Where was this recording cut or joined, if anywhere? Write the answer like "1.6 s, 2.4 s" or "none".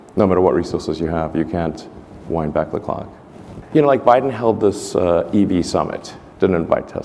none